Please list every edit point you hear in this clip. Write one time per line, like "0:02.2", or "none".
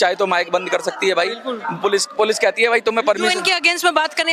none